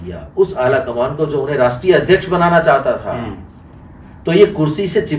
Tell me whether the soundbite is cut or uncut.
uncut